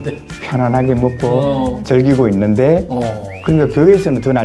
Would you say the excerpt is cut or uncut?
uncut